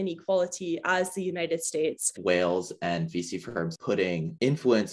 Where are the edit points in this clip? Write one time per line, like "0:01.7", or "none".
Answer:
0:02.1
0:03.7